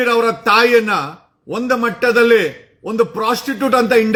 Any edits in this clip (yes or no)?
no